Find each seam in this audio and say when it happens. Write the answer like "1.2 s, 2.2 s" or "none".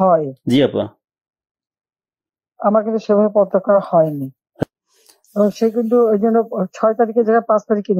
4.6 s